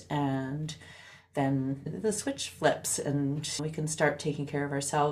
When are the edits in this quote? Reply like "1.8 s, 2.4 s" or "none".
1.9 s, 3.6 s